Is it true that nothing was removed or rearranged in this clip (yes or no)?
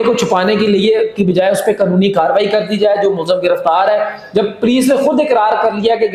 yes